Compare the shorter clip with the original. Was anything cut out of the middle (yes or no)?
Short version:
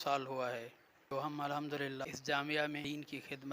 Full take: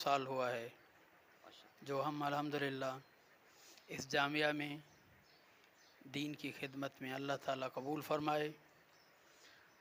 yes